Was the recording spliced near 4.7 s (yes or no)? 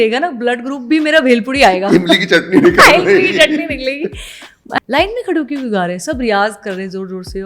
yes